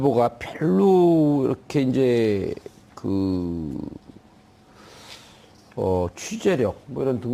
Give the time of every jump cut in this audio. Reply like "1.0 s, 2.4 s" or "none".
2.1 s